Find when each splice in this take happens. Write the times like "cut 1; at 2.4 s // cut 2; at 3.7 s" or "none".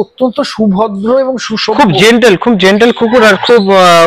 none

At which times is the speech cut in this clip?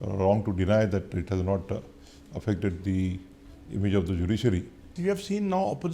cut 1; at 4.9 s

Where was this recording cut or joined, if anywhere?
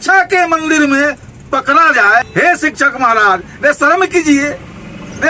cut 1; at 2.3 s

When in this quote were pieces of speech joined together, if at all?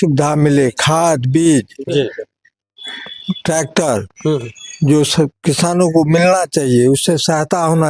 none

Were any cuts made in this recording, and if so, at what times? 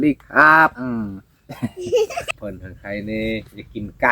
cut 1; at 2.3 s

